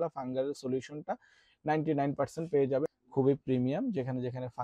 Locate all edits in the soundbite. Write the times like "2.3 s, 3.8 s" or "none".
2.9 s